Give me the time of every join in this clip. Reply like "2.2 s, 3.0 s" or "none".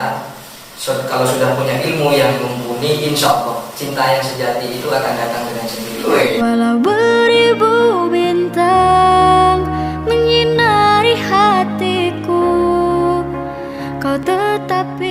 6.0 s